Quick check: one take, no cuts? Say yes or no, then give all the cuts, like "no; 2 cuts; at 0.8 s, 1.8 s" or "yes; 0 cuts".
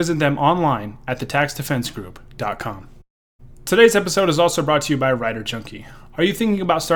yes; 0 cuts